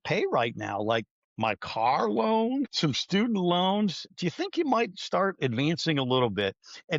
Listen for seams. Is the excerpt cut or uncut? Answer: cut